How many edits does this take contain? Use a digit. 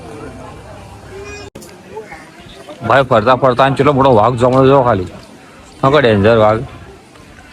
1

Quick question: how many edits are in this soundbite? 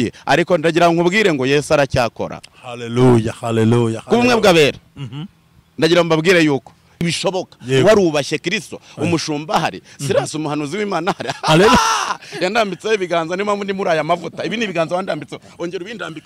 1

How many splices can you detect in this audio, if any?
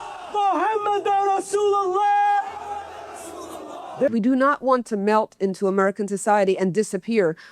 1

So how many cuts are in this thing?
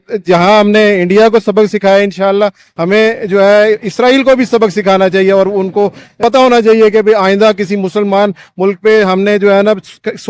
1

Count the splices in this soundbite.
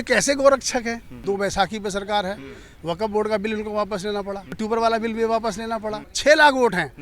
3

